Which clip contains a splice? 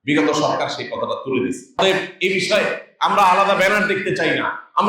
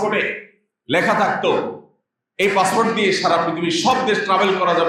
first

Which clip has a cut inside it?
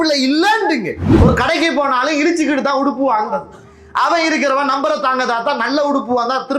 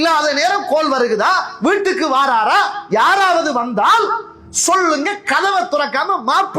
first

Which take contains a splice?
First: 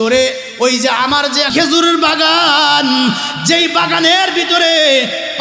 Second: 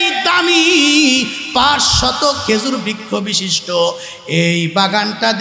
first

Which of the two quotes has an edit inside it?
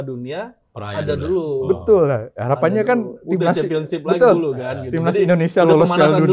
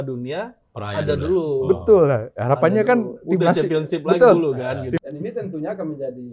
second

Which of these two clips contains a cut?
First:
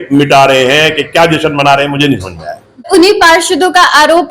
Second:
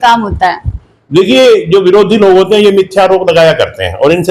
first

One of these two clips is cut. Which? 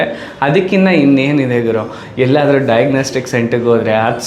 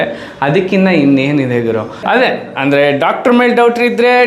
second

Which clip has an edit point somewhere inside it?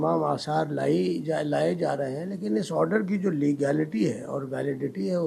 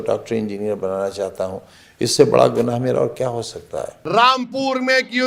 second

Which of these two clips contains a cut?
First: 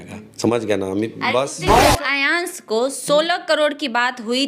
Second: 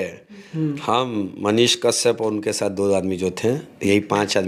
first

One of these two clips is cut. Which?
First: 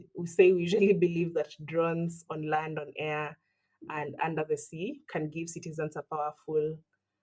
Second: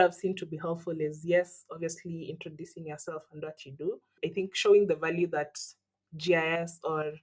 second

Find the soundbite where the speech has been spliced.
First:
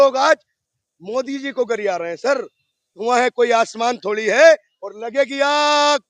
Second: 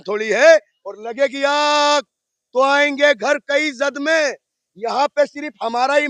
first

